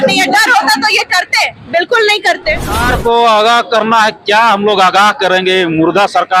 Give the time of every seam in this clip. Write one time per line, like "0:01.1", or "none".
0:02.8